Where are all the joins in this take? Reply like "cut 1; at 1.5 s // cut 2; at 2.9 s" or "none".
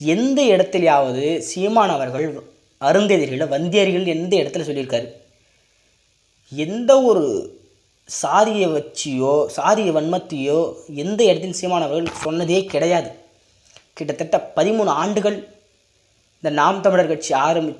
none